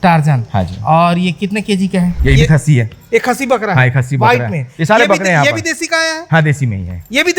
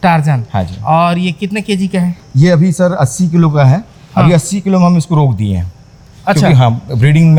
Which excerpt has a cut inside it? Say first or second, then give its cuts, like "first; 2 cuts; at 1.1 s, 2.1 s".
first; 1 cut; at 2.2 s